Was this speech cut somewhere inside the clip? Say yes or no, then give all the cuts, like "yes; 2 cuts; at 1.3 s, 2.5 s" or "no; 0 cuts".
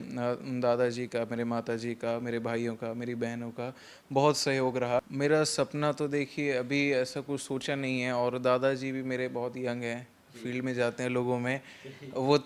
yes; 1 cut; at 5.1 s